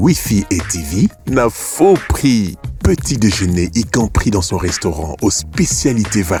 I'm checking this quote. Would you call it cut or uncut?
uncut